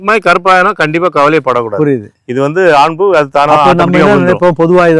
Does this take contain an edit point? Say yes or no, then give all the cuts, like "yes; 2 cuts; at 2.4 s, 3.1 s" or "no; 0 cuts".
no; 0 cuts